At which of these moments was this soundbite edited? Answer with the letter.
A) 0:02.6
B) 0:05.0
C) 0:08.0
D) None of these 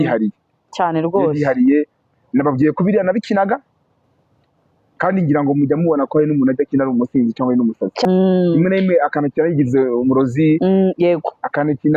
C